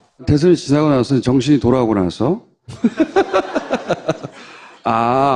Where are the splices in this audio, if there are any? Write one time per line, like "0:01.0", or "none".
0:02.8